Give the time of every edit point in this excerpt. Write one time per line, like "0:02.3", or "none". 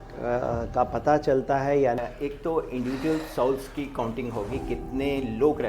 0:02.0